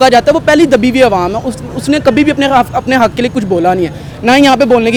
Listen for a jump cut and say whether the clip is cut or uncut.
uncut